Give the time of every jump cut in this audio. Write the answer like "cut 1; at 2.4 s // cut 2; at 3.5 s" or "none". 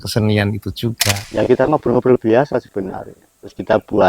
cut 1; at 1.1 s